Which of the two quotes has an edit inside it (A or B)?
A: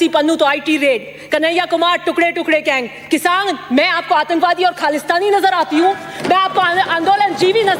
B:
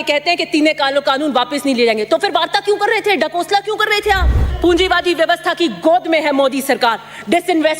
B